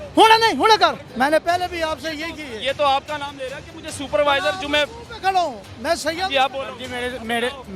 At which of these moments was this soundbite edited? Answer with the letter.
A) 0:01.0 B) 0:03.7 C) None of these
A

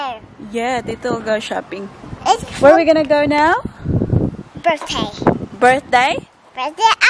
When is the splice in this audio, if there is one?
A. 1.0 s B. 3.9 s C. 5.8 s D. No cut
D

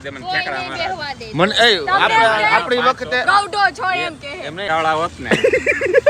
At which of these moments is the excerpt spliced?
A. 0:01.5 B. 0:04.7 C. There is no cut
B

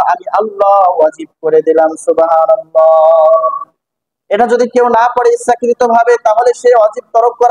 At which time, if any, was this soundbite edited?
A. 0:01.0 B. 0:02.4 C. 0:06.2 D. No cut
D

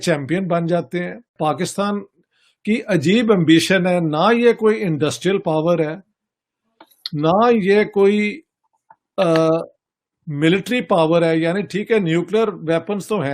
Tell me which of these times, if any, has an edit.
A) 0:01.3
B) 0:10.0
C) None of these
A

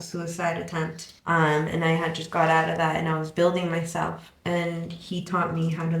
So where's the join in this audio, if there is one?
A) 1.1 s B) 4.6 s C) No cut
A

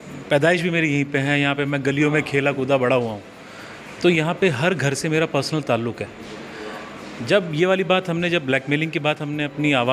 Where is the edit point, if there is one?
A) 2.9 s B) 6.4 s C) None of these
C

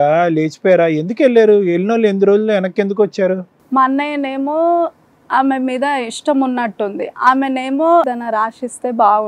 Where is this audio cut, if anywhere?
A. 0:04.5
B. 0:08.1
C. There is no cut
B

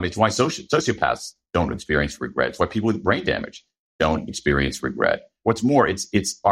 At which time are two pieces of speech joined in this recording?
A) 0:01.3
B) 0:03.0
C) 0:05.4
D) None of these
C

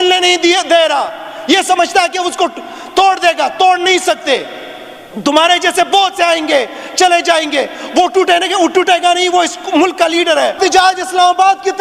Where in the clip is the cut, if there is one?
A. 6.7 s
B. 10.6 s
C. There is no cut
B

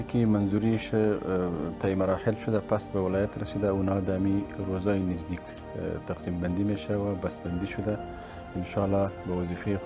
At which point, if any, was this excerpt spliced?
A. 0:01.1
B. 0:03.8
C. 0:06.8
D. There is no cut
D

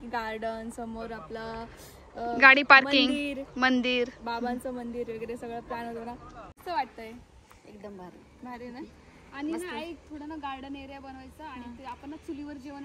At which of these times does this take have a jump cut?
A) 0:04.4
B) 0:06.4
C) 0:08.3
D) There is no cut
B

